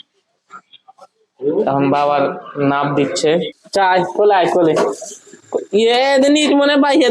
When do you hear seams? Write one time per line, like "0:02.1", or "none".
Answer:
0:03.6

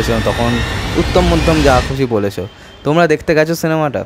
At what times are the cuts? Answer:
none

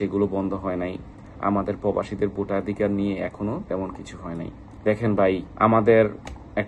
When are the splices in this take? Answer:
none

